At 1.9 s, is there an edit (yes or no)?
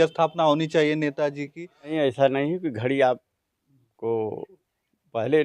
yes